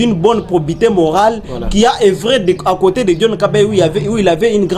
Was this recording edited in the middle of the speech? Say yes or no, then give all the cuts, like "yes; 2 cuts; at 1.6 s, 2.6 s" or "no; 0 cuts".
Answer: no; 0 cuts